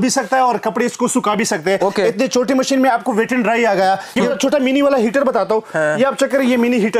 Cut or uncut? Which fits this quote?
cut